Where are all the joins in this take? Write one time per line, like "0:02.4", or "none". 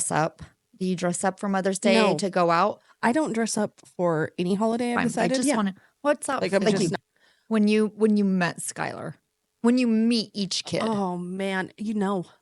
0:05.4